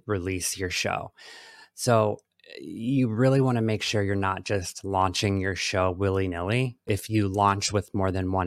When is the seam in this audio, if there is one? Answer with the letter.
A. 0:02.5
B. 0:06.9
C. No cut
B